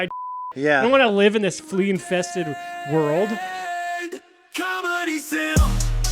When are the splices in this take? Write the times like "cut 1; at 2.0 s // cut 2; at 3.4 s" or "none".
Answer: cut 1; at 3.5 s